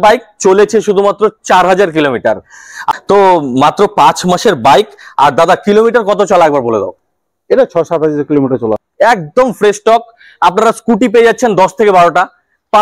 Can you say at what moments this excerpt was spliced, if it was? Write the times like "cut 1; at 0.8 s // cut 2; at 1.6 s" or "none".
cut 1; at 2.8 s // cut 2; at 8.8 s